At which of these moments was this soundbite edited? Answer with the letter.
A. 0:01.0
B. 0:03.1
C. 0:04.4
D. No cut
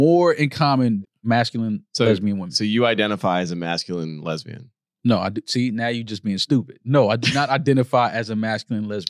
A